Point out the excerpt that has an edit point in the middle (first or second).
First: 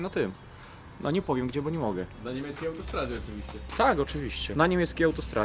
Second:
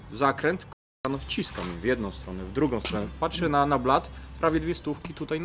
first